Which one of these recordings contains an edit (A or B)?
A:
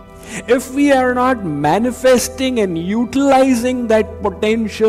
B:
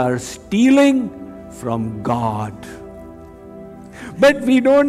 B